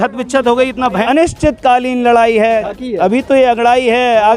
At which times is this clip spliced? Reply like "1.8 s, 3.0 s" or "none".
1.0 s, 2.6 s